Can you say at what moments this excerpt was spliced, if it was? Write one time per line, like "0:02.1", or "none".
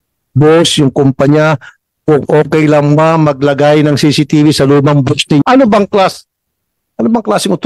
0:05.4